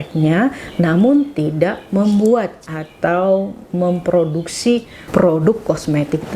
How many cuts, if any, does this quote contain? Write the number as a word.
one